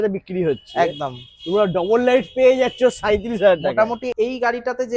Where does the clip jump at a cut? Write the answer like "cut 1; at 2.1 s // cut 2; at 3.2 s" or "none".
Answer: cut 1; at 4.1 s

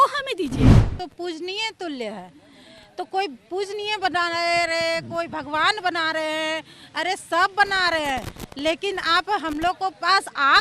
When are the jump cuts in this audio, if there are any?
cut 1; at 0.9 s

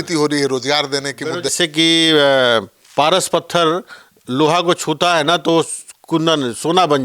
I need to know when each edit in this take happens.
cut 1; at 1.5 s

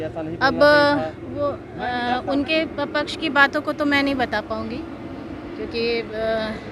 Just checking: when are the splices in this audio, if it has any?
none

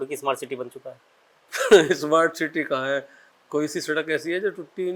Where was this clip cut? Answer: none

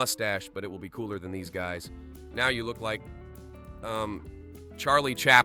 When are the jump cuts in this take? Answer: none

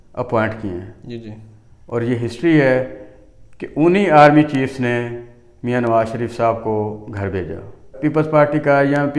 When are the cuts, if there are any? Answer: cut 1; at 7.9 s

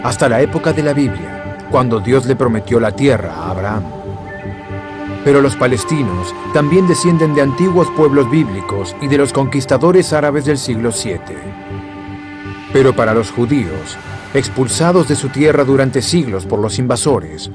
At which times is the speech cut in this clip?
cut 1; at 6.6 s

